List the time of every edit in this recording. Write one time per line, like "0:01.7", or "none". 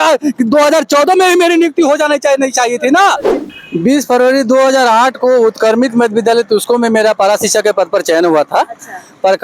0:03.4